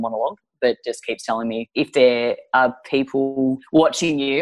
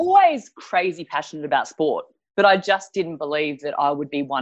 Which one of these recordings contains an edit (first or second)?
first